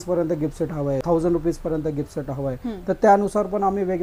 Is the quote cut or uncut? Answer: cut